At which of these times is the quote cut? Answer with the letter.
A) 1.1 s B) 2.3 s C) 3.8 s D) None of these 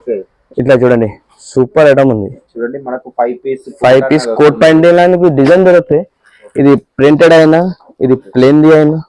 D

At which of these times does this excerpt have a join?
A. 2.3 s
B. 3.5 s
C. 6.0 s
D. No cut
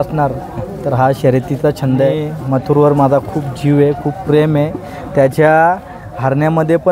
A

